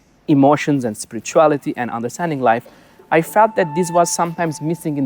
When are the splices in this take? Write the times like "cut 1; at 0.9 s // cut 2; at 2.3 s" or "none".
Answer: none